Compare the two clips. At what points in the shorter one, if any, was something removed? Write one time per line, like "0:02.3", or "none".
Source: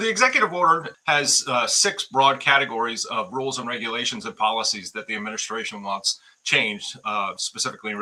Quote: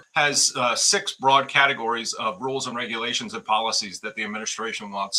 none